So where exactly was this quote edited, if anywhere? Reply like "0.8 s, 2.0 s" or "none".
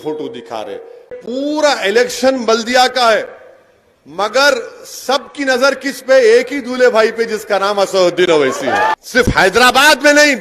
1.2 s, 8.9 s